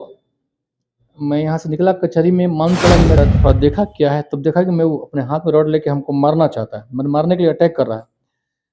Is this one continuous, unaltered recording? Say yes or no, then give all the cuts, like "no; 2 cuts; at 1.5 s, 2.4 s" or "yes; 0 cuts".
no; 1 cut; at 3.2 s